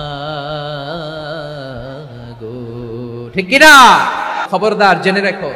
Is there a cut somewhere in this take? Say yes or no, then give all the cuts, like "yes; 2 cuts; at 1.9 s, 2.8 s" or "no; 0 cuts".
yes; 1 cut; at 4.4 s